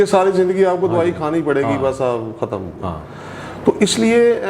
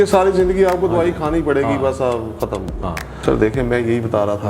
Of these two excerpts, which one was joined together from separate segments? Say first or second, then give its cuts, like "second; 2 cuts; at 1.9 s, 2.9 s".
second; 1 cut; at 3.0 s